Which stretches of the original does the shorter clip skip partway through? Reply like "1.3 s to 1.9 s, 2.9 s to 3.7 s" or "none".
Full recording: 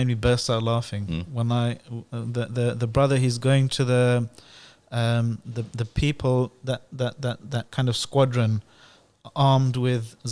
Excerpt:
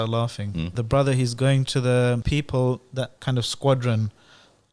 1.3 s to 2.8 s, 4.3 s to 5.9 s, 6.9 s to 7.7 s